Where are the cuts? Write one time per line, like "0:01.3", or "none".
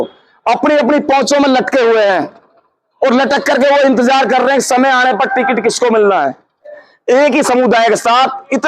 0:06.8